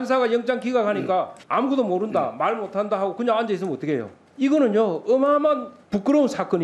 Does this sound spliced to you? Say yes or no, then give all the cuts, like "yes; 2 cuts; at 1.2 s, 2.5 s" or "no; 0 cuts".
yes; 3 cuts; at 1.4 s, 4.2 s, 5.8 s